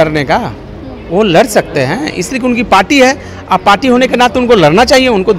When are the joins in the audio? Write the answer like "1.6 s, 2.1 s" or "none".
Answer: none